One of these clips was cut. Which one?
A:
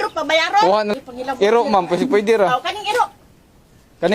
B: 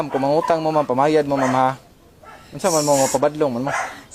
A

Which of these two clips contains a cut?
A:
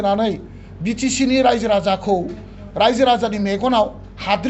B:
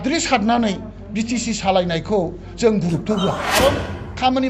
B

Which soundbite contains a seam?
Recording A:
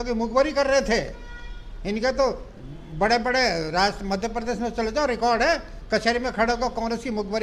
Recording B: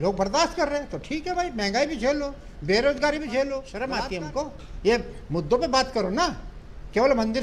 B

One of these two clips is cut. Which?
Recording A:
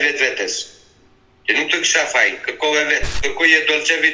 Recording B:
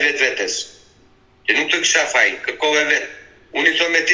A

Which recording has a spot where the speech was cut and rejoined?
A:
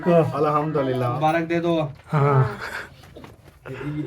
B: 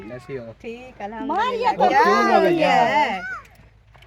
A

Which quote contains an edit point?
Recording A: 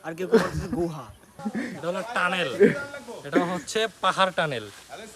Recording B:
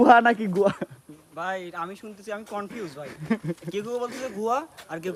A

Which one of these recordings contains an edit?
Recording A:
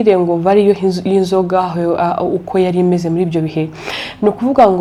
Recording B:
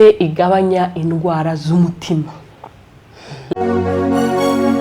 B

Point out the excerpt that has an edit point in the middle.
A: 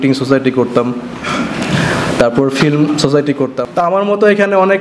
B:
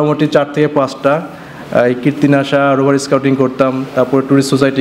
A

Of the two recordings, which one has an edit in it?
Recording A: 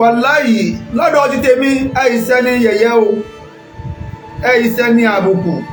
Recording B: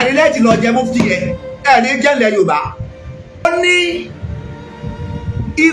B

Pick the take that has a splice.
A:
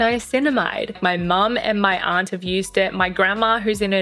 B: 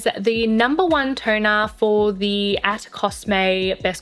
A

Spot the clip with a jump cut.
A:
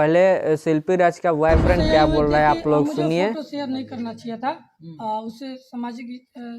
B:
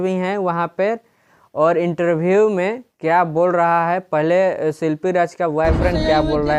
A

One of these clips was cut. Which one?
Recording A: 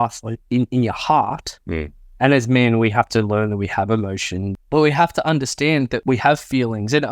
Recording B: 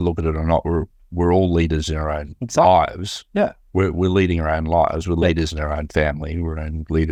A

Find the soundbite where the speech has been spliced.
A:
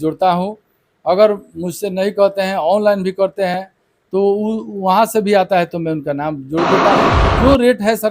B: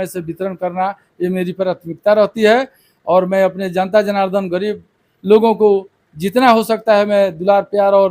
A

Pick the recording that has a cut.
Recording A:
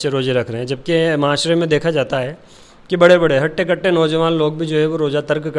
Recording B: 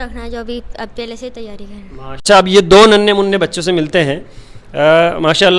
B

